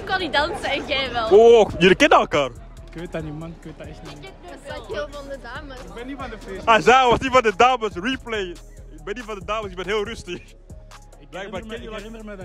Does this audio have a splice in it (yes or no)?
no